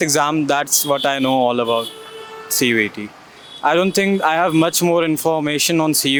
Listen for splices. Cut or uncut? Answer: uncut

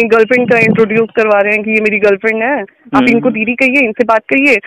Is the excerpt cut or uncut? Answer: uncut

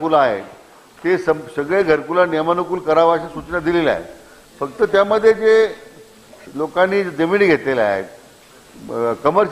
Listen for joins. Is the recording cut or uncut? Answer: uncut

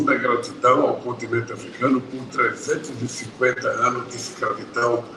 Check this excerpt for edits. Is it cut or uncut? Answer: uncut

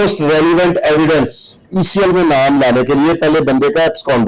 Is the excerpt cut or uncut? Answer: cut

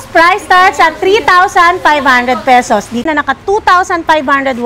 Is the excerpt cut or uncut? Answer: cut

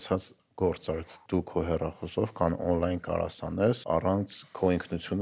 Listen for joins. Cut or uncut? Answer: cut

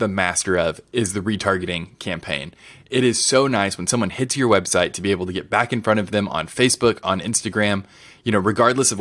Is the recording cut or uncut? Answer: uncut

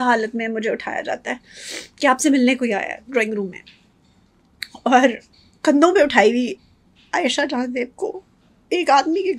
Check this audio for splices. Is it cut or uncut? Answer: uncut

